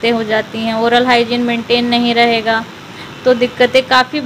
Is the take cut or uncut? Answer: uncut